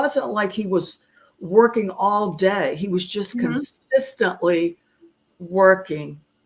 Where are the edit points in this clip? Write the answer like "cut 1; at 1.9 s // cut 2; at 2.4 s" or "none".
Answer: none